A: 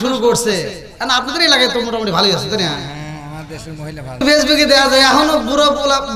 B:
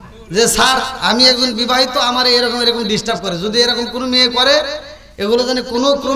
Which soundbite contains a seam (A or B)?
A